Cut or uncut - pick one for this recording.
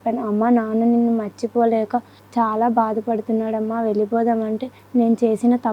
cut